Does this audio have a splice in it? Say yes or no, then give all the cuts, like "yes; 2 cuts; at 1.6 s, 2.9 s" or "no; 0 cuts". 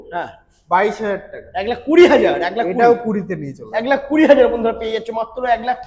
no; 0 cuts